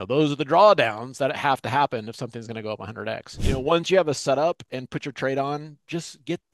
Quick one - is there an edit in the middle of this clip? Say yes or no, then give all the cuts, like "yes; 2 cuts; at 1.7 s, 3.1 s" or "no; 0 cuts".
yes; 1 cut; at 3.4 s